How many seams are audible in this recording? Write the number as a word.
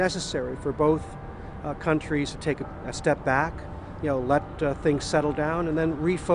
one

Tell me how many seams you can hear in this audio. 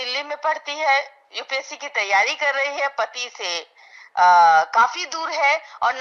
zero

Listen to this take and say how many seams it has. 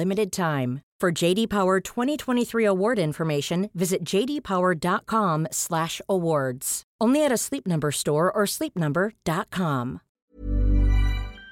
one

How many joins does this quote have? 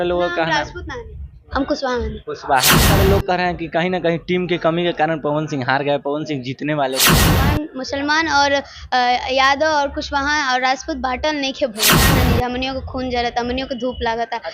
three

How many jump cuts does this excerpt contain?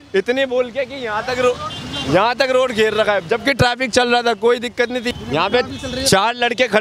one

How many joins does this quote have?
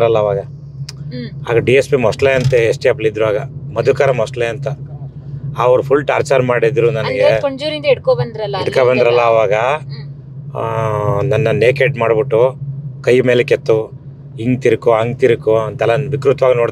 zero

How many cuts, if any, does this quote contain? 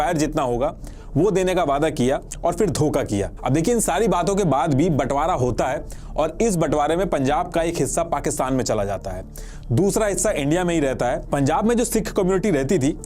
zero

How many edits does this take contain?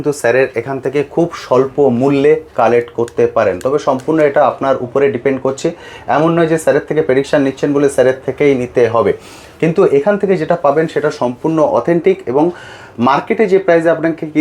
zero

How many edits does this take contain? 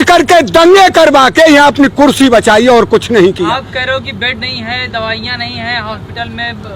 zero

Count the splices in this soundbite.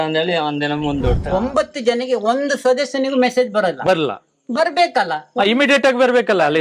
one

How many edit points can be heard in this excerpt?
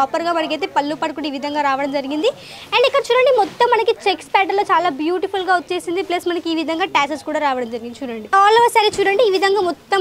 one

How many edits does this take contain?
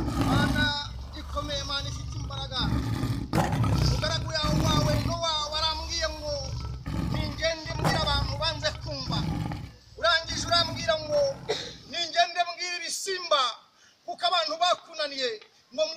zero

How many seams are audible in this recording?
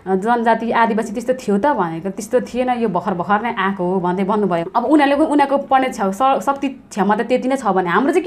one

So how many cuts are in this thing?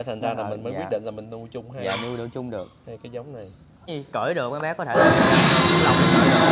one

